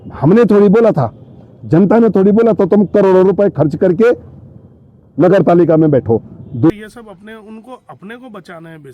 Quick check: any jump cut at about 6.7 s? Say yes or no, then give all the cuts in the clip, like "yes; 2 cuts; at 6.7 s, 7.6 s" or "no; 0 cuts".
yes; 1 cut; at 6.7 s